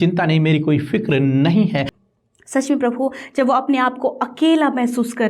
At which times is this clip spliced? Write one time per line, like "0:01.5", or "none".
0:01.9